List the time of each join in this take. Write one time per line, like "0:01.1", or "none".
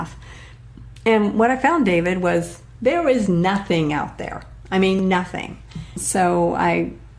0:06.0